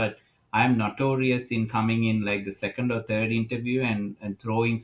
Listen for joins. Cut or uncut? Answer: uncut